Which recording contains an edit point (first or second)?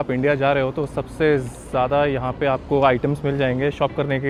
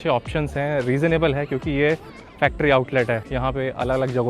second